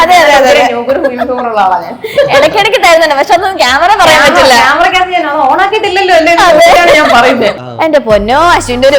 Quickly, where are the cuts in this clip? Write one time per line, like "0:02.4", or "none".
0:07.6